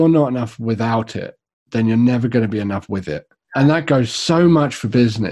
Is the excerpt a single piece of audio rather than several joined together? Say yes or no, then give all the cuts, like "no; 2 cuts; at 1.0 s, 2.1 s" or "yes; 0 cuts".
no; 1 cut; at 3.4 s